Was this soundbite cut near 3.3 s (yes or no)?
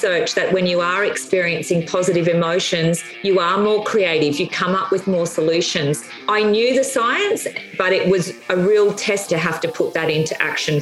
no